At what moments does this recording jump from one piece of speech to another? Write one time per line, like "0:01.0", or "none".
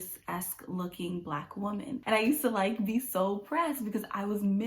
0:02.0